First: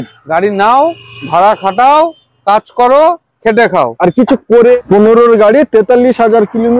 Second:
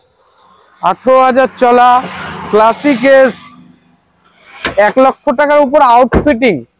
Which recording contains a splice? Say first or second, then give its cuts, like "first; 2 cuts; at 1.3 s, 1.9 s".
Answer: first; 1 cut; at 4.8 s